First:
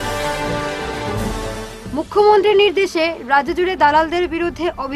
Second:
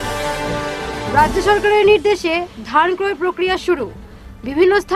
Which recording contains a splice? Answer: second; 1 cut; at 1.0 s

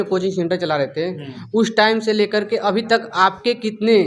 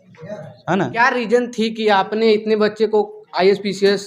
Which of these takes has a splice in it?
second; 1 cut; at 0.9 s

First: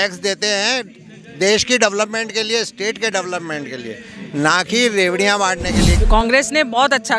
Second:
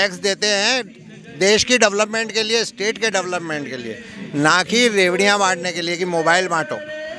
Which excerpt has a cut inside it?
first; 1 cut; at 5.8 s

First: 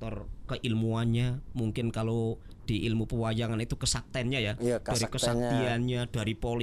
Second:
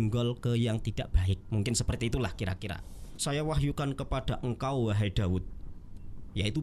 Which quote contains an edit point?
second; 1 cut; at 3.1 s

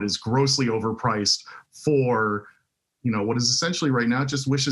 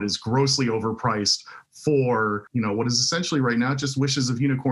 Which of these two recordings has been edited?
second; 1 cut; at 2.4 s

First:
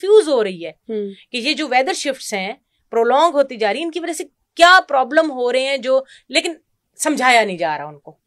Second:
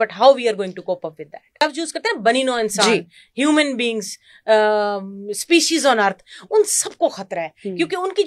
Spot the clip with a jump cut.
second; 1 cut; at 1.5 s

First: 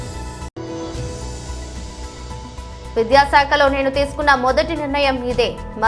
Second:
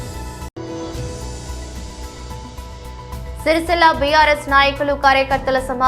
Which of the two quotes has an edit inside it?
second; 1 cut; at 2.7 s

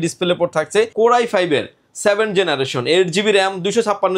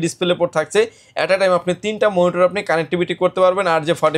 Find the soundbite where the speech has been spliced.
first; 1 cut; at 0.9 s

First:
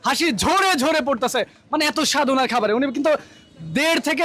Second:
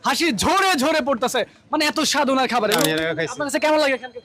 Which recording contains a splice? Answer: second; 1 cut; at 2.8 s

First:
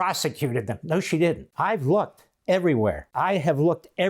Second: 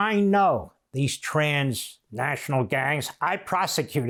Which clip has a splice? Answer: first; 2 cuts; at 1.5 s, 3.1 s

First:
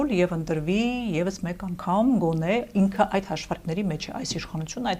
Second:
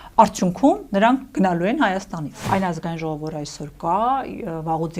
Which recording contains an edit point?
second; 1 cut; at 2.3 s

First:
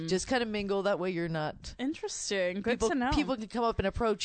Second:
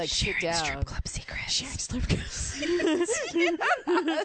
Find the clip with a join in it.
first; 1 cut; at 1.7 s

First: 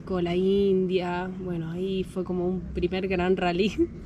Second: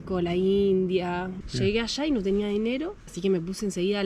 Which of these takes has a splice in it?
second; 1 cut; at 1.4 s

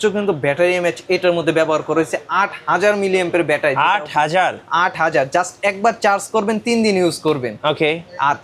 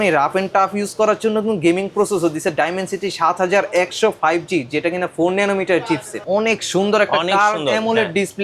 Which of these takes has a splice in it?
second; 1 cut; at 6.2 s

